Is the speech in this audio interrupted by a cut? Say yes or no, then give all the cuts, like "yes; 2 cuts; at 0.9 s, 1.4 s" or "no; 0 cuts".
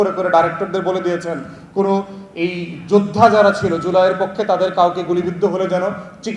no; 0 cuts